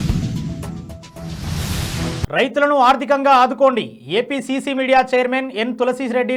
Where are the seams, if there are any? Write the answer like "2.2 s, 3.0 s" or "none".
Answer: none